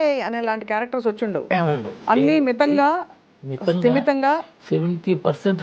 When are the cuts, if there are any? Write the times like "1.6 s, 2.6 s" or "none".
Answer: 4.5 s